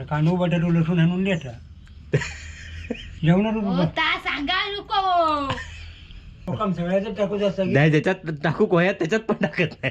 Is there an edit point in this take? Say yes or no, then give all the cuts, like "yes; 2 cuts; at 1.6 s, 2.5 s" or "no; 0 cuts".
yes; 1 cut; at 6.5 s